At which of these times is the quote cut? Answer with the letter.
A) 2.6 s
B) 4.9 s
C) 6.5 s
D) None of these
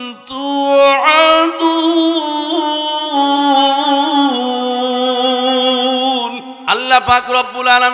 C